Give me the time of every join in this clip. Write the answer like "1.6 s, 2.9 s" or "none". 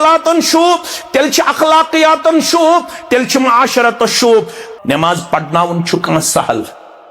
4.6 s